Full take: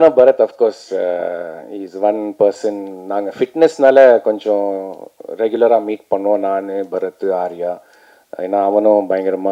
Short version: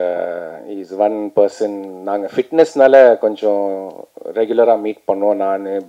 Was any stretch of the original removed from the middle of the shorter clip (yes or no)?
no